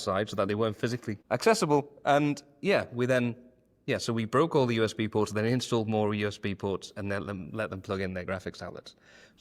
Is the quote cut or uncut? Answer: cut